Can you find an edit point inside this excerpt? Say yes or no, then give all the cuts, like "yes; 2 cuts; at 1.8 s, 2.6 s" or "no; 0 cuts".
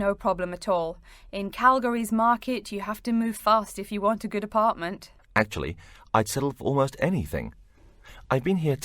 yes; 1 cut; at 6.6 s